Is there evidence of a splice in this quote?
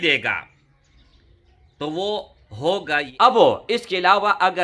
yes; 1 cut; at 3.1 s

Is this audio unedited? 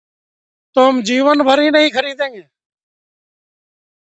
yes; 0 cuts

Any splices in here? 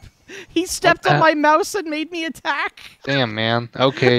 yes; 1 cut; at 2.9 s

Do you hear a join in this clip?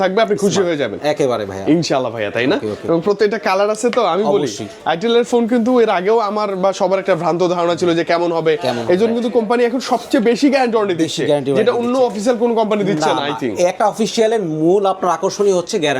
no; 0 cuts

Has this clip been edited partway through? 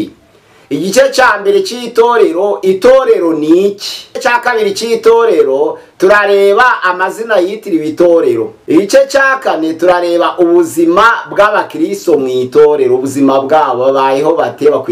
yes; 2 cuts; at 4.2 s, 8.6 s

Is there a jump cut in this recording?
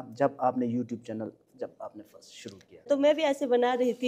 yes; 1 cut; at 2.9 s

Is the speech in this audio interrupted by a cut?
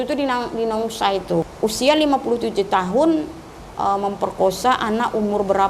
yes; 1 cut; at 1.5 s

